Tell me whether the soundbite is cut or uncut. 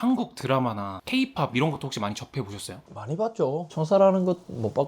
cut